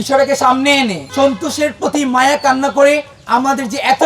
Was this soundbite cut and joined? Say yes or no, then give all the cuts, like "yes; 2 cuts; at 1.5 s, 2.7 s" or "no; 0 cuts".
yes; 2 cuts; at 1.0 s, 3.1 s